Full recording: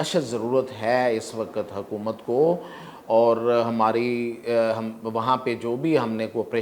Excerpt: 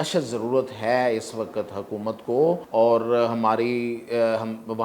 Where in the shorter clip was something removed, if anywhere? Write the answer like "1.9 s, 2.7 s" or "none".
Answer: 2.6 s